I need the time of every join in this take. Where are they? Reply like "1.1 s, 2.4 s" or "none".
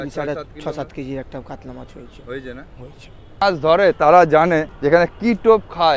3.4 s, 4.7 s